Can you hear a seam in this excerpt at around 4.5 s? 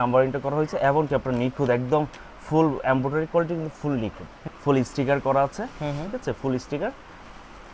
yes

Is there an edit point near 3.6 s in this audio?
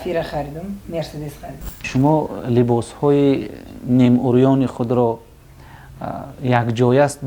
no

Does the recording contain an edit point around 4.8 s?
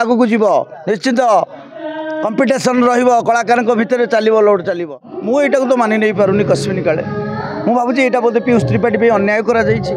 yes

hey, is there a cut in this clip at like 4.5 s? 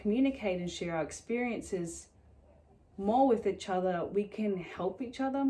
no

